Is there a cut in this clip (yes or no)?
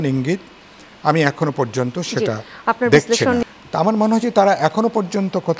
yes